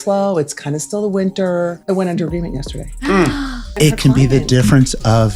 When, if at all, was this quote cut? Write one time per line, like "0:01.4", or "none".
0:01.8
0:03.7